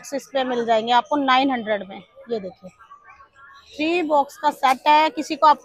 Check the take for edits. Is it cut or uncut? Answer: uncut